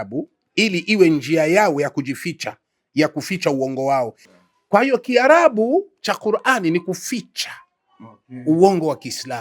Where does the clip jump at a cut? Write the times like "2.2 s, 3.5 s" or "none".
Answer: 4.2 s